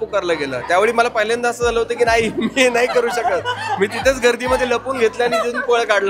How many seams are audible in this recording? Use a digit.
0